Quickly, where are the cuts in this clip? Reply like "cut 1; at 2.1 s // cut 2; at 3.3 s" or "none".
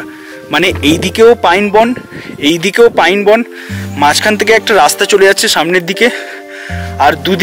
none